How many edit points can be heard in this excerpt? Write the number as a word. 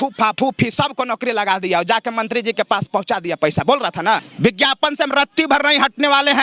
one